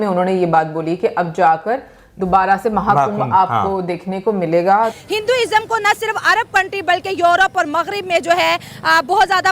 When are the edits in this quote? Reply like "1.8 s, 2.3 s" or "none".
5.0 s